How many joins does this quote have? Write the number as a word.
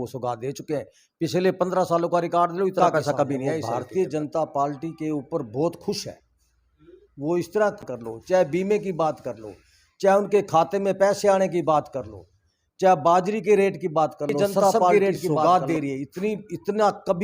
three